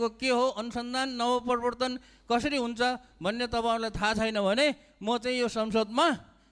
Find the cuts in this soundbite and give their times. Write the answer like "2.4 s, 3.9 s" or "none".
none